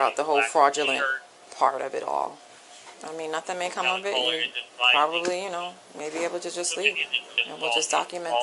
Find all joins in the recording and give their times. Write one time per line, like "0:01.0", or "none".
none